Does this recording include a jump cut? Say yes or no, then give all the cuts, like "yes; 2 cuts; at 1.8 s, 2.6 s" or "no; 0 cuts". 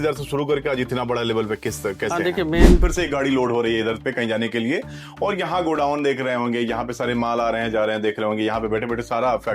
yes; 1 cut; at 2.8 s